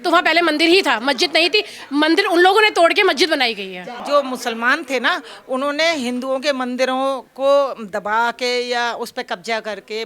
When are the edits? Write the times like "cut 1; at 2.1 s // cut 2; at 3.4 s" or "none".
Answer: cut 1; at 3.9 s